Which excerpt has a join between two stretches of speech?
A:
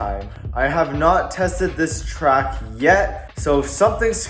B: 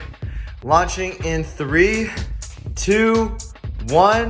A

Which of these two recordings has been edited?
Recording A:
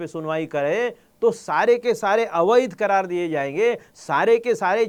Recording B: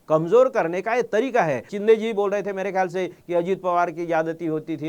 B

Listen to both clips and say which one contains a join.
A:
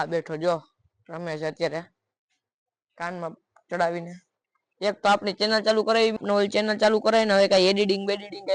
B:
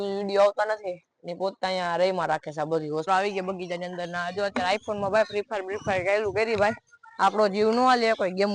B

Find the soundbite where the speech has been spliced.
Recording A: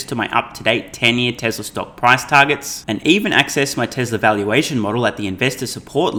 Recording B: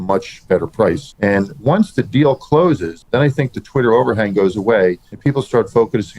B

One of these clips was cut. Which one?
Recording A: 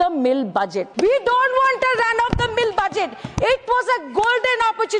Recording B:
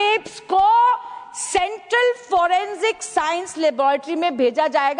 A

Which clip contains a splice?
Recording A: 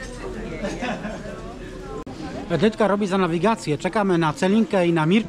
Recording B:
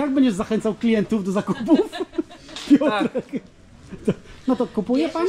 A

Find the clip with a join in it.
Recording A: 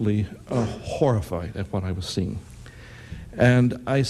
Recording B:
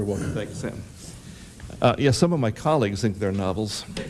A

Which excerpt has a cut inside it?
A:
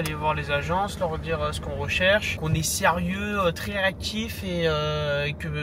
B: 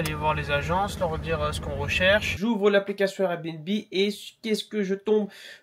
B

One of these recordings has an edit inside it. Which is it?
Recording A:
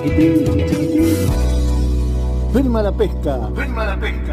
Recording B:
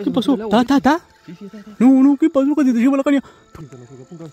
B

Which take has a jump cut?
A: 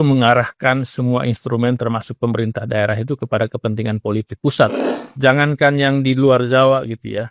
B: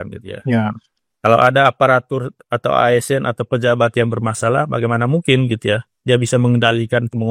A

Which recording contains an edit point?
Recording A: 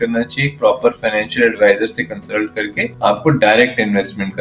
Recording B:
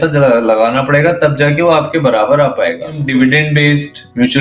B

